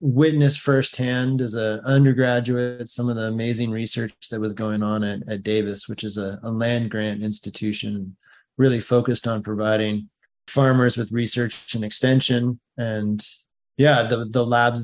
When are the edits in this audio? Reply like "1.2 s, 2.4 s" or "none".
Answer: none

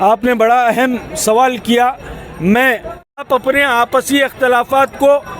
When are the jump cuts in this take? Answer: 3.2 s

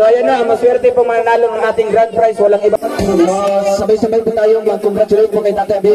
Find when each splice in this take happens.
2.8 s

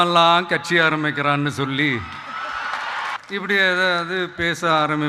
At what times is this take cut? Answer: 3.2 s

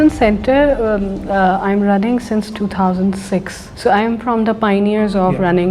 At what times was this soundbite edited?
3.6 s

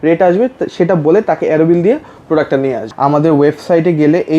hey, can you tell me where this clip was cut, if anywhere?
2.8 s

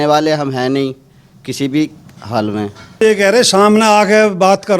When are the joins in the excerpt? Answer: 3.0 s

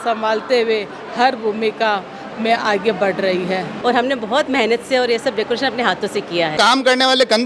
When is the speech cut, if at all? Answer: 3.7 s, 6.5 s

